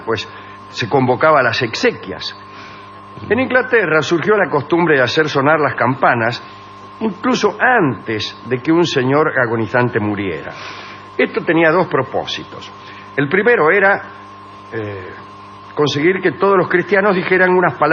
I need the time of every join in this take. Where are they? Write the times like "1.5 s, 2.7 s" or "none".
none